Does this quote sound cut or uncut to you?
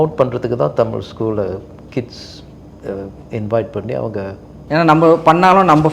cut